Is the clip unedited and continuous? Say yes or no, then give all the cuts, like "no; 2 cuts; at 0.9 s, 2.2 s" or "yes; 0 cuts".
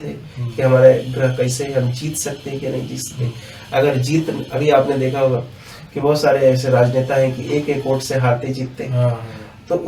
yes; 0 cuts